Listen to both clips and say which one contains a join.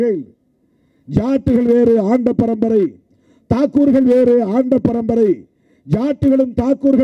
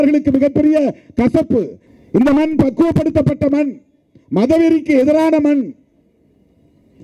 second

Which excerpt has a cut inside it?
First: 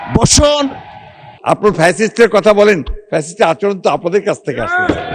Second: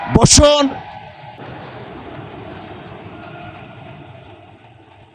first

